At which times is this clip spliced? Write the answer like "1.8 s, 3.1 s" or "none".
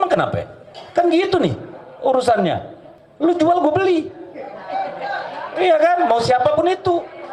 none

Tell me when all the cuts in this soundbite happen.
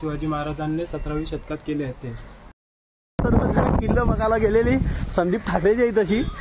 2.6 s

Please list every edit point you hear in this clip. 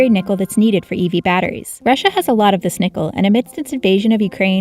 1.6 s

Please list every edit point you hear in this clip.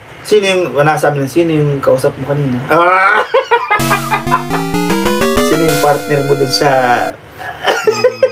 none

